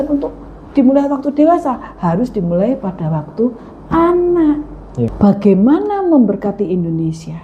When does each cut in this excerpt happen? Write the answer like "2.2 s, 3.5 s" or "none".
5.1 s